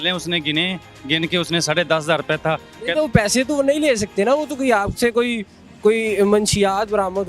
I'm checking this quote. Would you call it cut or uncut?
uncut